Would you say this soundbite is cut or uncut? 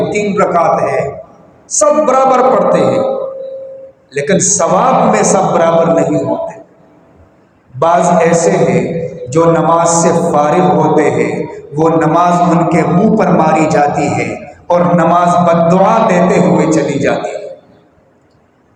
uncut